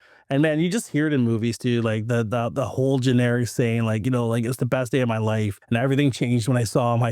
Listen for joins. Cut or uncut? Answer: cut